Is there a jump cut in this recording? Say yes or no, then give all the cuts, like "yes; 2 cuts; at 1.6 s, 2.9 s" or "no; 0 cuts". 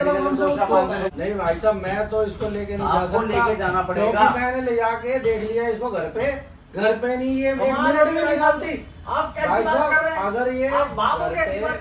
yes; 1 cut; at 1.1 s